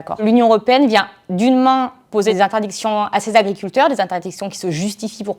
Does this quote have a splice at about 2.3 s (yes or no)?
yes